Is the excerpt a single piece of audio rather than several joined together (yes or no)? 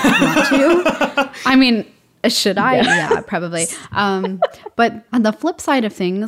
no